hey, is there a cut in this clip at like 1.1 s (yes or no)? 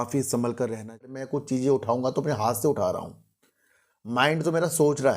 yes